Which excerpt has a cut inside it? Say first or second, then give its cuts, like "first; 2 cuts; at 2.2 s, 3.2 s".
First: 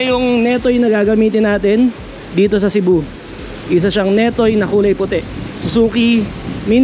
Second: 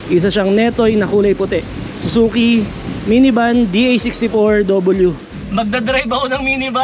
second; 1 cut; at 5.3 s